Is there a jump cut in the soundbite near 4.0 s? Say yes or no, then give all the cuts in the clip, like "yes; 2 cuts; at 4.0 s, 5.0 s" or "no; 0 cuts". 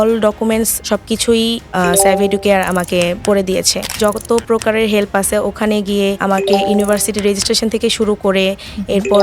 yes; 1 cut; at 4.0 s